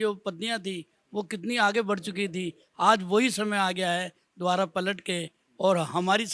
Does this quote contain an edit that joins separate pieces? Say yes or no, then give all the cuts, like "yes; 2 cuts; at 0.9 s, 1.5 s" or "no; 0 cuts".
no; 0 cuts